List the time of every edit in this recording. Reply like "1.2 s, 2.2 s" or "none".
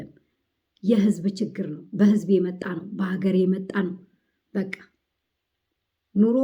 none